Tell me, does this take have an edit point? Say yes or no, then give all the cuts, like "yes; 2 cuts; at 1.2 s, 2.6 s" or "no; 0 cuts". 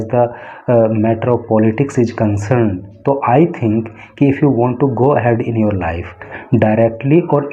yes; 1 cut; at 6.3 s